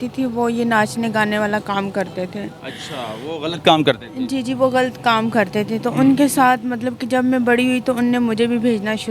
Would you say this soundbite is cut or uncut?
uncut